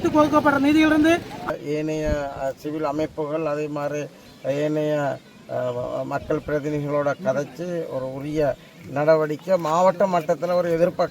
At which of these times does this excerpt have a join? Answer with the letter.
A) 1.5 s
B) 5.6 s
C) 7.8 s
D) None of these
A